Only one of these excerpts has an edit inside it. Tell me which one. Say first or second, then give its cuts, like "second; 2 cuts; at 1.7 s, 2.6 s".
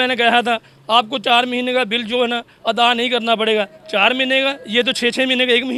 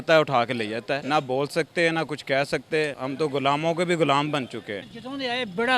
second; 3 cuts; at 1.0 s, 3.0 s, 4.8 s